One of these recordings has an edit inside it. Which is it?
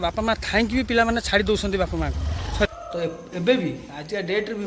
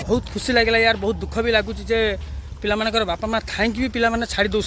first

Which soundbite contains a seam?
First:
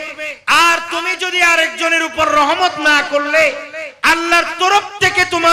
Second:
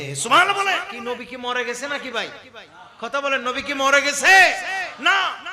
second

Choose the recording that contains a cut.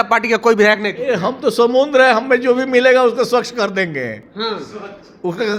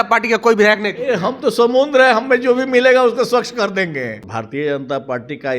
second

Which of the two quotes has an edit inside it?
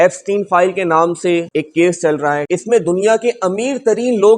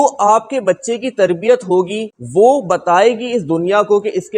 first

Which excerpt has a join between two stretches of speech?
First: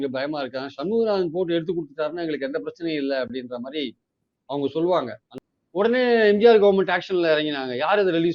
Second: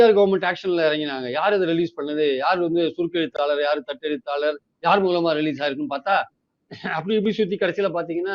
first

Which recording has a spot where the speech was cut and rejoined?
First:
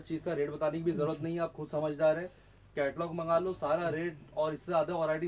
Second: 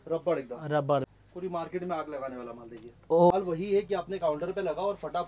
second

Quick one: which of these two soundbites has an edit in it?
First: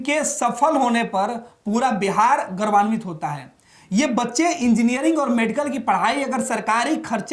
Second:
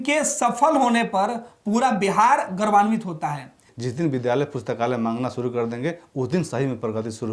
second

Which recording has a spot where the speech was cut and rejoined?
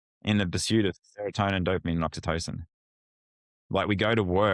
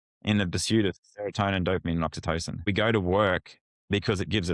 second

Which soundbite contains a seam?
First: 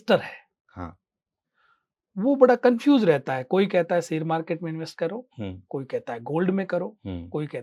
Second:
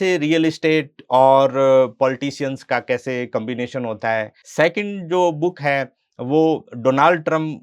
second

